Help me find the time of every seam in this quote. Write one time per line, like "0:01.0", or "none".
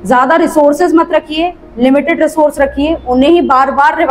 none

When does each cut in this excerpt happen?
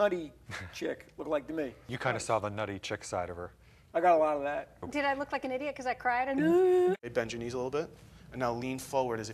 0:01.9
0:04.8
0:06.9

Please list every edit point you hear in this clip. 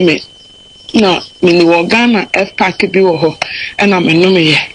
0:02.7

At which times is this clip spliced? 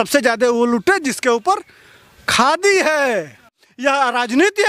0:03.6

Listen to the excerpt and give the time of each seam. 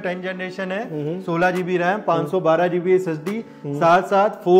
none

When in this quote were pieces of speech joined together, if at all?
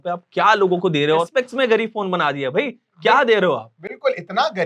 0:01.3

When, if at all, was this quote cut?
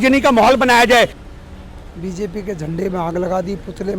0:01.2

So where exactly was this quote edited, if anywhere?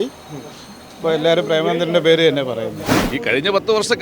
0:02.8

